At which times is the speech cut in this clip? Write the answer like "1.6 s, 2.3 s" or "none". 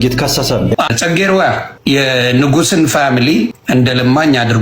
0.7 s, 1.7 s, 3.6 s